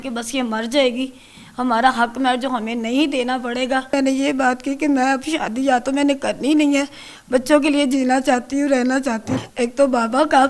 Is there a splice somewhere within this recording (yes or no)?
yes